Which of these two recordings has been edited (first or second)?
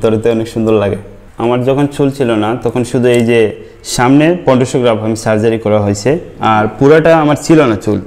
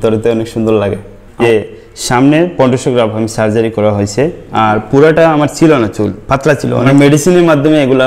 second